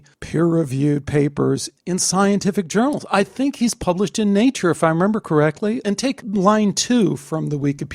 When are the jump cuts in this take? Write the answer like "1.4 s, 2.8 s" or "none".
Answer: 5.8 s

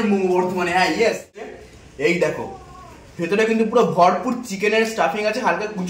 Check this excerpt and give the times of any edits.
1.5 s

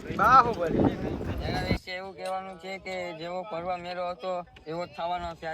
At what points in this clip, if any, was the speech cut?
1.8 s

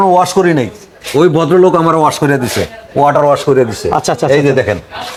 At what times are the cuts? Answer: none

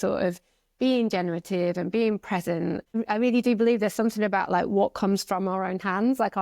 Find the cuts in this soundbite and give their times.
2.8 s

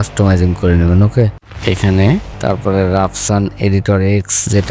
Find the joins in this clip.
1.5 s, 2.3 s

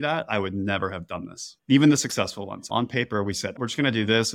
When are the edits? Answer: 2.7 s, 3.5 s

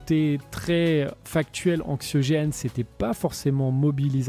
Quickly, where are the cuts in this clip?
none

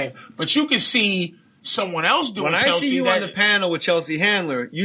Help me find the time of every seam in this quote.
none

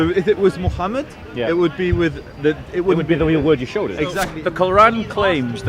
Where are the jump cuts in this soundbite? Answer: 4.3 s

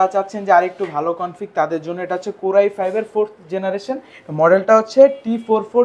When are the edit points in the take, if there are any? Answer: none

